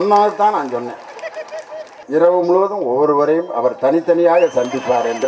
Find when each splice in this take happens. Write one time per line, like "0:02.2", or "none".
0:02.0

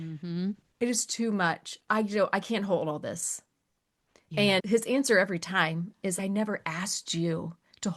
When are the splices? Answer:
0:06.2

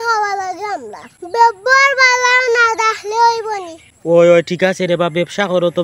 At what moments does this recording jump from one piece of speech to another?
none

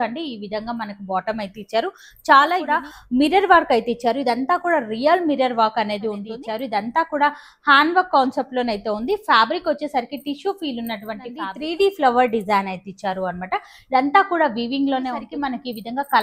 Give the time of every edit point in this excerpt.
0:02.7
0:06.3
0:11.5
0:15.2

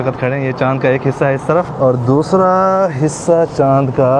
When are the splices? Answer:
0:01.7

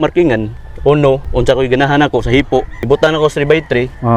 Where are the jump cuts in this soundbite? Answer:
0:01.3
0:02.7

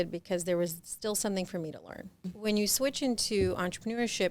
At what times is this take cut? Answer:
0:02.3

